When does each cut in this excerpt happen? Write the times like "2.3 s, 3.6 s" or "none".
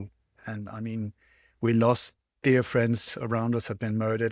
none